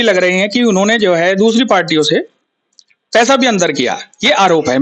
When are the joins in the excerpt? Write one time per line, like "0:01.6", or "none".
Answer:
none